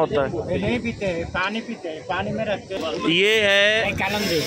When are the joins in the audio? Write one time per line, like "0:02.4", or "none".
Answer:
0:02.7